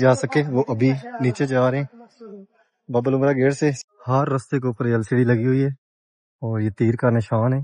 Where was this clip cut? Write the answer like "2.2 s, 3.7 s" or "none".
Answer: 3.8 s